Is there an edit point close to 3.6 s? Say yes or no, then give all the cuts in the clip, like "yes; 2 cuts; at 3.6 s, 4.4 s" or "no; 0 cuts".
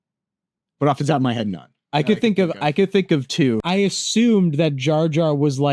yes; 1 cut; at 3.6 s